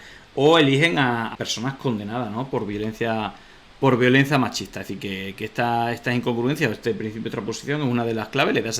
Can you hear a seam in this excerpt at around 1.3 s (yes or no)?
yes